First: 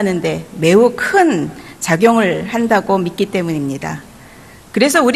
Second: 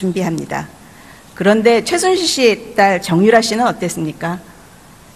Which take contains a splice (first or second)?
first